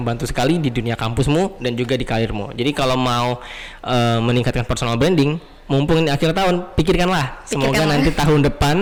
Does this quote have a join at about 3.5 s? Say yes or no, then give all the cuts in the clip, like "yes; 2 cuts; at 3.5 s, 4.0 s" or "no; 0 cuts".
no; 0 cuts